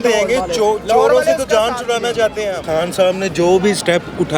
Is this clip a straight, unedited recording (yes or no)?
no